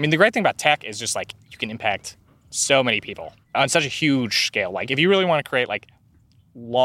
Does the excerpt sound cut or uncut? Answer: cut